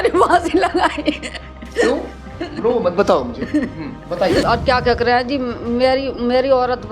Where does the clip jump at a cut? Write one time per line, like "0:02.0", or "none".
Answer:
0:04.4